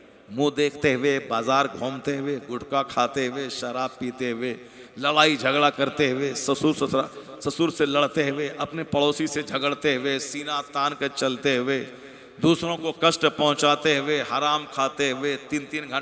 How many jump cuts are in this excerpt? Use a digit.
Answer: 0